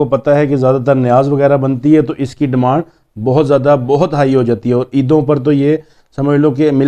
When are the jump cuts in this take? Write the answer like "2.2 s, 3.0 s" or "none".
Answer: none